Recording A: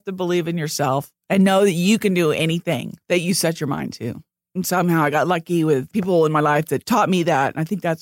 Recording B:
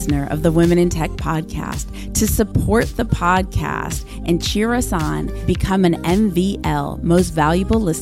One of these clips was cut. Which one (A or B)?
A